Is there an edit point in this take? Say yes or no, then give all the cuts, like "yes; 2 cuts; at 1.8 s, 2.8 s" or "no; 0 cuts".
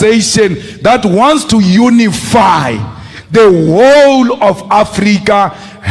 no; 0 cuts